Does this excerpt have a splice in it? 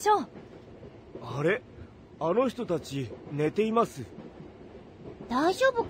no; 0 cuts

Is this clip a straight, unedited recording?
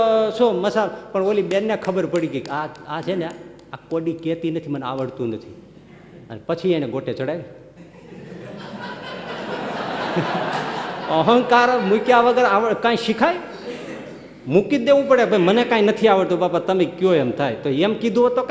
yes; 0 cuts

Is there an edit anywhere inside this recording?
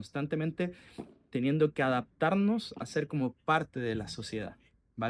no; 0 cuts

